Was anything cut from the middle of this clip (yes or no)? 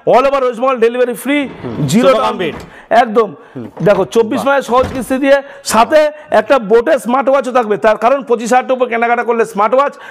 no